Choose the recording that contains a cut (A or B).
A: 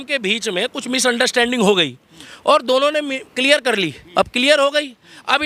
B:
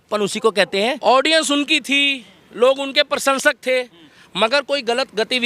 B